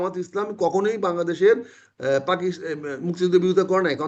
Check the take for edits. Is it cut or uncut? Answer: uncut